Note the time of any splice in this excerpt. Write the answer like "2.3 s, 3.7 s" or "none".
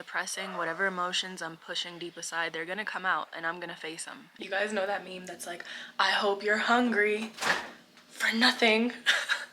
none